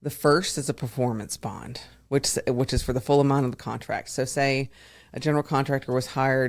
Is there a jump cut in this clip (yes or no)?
no